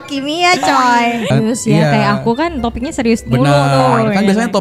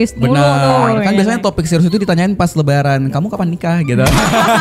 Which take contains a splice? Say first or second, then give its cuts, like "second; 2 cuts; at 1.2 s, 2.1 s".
first; 1 cut; at 1.3 s